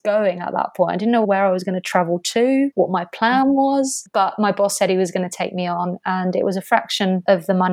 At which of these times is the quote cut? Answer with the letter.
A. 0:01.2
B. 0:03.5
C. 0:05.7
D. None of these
A